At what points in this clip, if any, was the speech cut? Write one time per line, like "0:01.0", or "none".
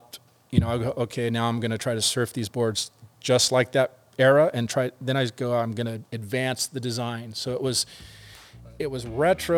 none

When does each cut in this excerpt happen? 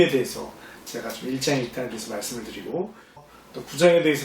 0:03.3

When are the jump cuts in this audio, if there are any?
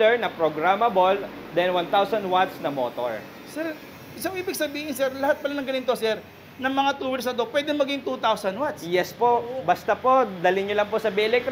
none

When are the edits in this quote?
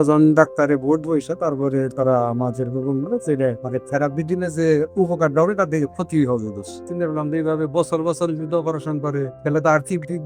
0:03.6
0:06.8
0:09.3

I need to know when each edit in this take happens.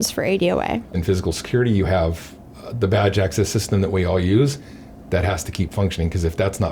none

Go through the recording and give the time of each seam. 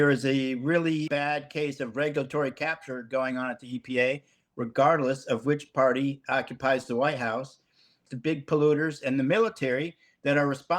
0:01.1

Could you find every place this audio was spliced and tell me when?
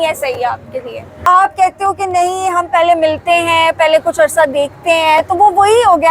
0:01.2

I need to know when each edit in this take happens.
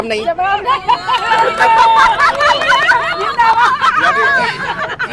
none

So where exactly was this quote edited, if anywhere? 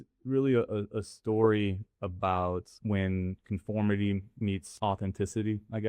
0:02.7
0:04.7

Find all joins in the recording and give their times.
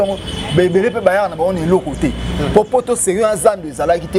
none

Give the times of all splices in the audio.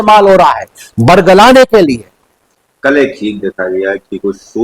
none

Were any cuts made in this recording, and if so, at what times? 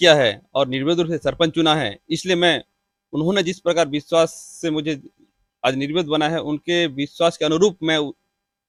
none

